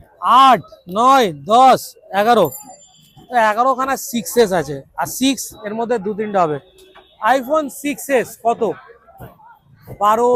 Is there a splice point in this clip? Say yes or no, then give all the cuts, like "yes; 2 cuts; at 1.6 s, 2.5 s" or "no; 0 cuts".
no; 0 cuts